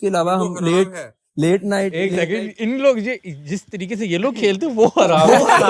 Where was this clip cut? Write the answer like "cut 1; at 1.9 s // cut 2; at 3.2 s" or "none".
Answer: none